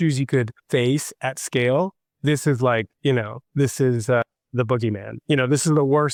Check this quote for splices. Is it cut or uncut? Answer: uncut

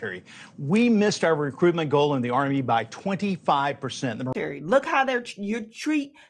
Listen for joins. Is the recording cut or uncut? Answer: cut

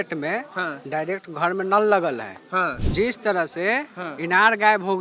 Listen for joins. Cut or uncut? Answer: cut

